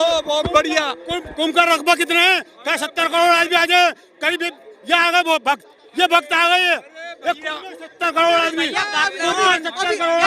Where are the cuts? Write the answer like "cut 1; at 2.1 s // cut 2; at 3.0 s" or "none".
none

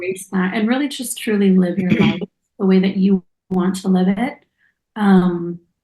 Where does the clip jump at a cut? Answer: none

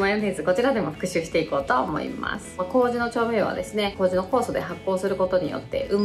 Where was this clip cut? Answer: cut 1; at 2.6 s

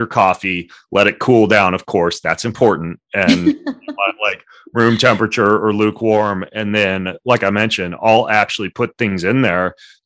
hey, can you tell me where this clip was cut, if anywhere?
none

